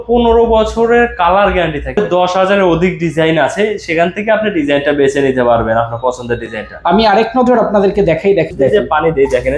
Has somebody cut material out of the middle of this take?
yes; 2 cuts; at 2.0 s, 8.5 s

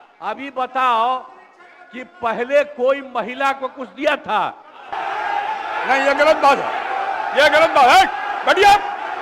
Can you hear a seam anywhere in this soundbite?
yes; 1 cut; at 4.9 s

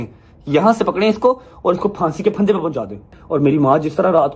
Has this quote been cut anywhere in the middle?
yes; 1 cut; at 3.2 s

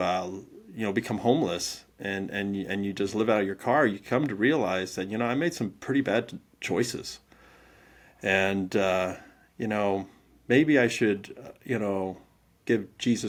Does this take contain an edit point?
no; 0 cuts

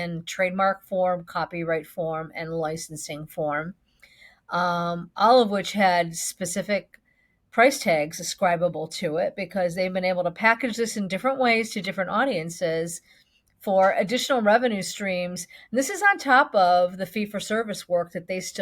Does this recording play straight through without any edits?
yes; 0 cuts

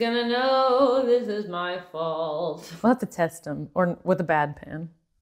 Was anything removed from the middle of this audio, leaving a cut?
yes; 1 cut; at 2.7 s

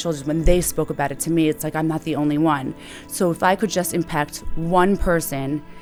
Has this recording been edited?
no; 0 cuts

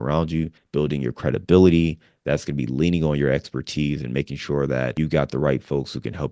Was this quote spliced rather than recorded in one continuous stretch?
yes; 1 cut; at 4.9 s

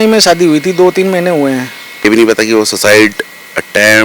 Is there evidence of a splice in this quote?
yes; 1 cut; at 2.0 s

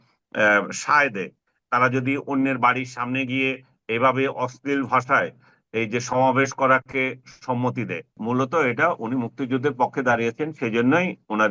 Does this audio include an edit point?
yes; 1 cut; at 8.2 s

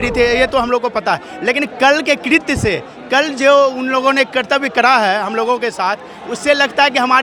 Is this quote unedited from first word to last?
yes; 0 cuts

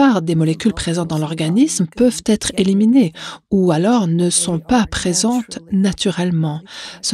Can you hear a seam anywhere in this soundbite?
no; 0 cuts

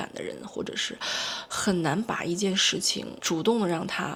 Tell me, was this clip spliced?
no; 0 cuts

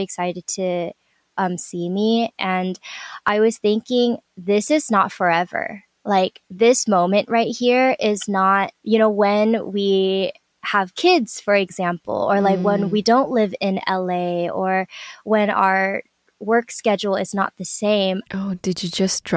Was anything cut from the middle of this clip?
no; 0 cuts

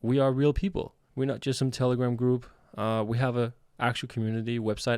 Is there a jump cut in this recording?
no; 0 cuts

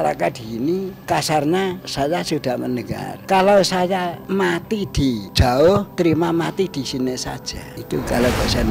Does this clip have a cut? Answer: yes; 7 cuts; at 0.9 s, 1.8 s, 3.1 s, 4.2 s, 5.3 s, 5.9 s, 7.7 s

